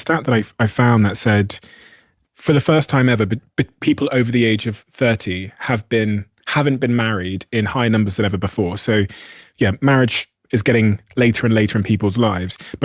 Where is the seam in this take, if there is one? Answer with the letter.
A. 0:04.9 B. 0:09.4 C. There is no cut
C